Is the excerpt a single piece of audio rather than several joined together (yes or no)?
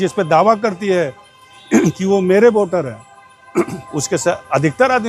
yes